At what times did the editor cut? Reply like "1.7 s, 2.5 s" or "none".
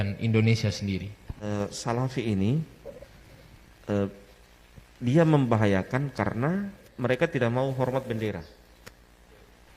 1.5 s, 6.8 s